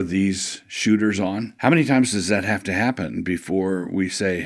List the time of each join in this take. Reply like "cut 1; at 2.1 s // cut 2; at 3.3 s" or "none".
cut 1; at 1.5 s